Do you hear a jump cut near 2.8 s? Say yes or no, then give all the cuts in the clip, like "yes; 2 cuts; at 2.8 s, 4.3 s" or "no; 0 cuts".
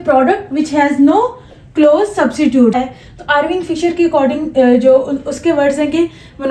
yes; 1 cut; at 2.8 s